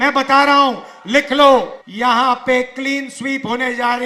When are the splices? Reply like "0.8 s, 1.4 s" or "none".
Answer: 1.8 s

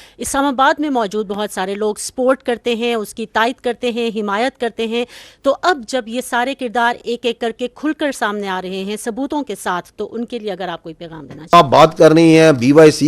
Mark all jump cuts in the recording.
11.5 s

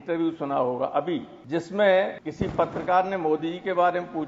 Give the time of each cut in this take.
1.3 s, 2.2 s

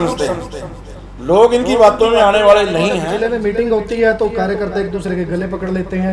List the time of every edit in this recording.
3.0 s

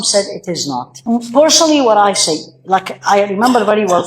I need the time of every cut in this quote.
0.9 s

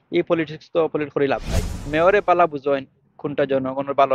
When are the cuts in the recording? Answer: 1.9 s

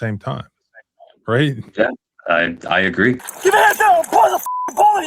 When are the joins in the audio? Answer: 3.3 s

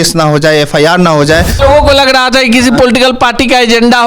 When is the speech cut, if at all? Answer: 1.5 s

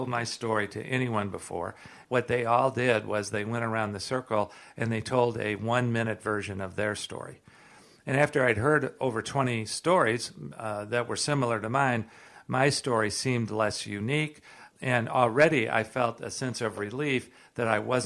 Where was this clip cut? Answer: 1.9 s, 14.7 s

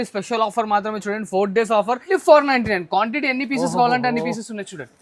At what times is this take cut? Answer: 2.1 s

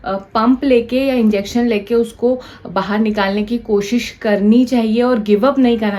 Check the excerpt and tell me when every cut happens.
none

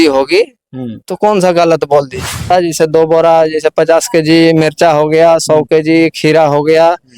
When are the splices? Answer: 2.5 s

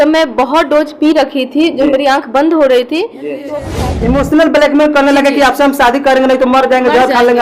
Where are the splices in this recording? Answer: 3.5 s

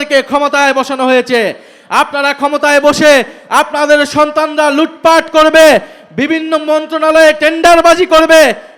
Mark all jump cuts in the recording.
none

